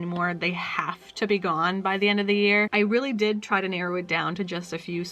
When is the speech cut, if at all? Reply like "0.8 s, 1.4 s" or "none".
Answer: 2.7 s

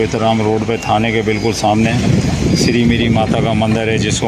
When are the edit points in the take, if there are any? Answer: none

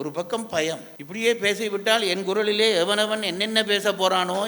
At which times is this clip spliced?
1.0 s

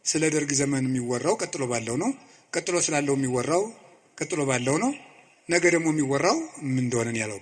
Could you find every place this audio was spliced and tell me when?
none

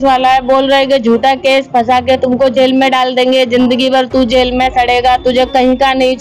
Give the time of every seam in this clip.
none

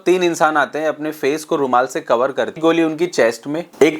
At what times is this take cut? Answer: 2.6 s

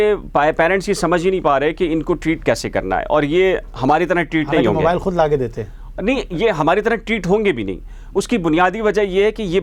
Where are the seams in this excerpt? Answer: none

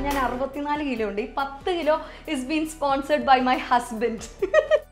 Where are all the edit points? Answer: none

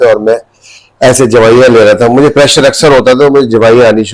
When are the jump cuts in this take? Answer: none

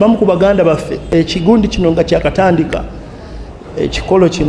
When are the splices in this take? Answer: 0.9 s

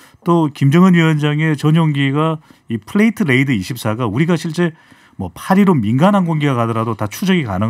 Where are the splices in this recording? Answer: none

